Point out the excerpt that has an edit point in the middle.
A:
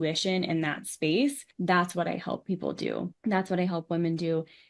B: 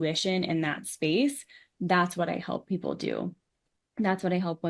A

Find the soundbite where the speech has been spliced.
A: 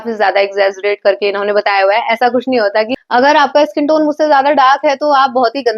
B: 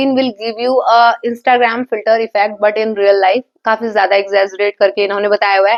A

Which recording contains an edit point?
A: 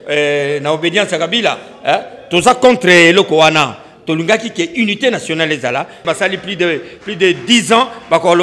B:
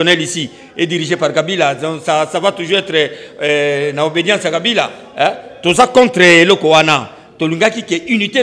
A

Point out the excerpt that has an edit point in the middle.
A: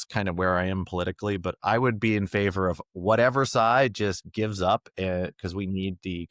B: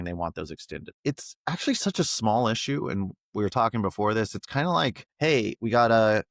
B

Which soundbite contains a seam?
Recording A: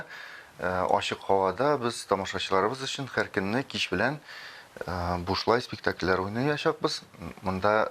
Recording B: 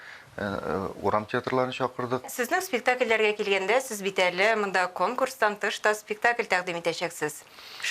B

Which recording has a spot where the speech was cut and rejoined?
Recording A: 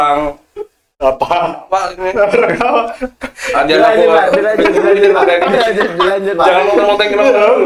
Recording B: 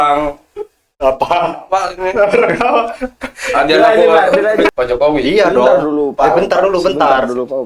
B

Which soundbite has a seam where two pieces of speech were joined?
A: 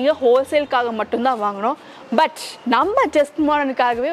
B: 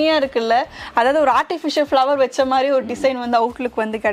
A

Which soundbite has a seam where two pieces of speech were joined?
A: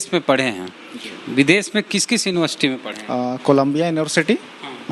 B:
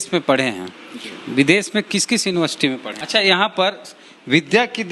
B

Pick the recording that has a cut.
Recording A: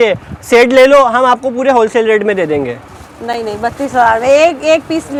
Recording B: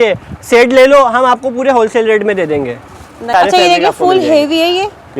B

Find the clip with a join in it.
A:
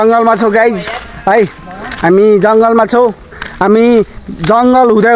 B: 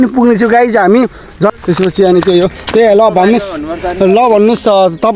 B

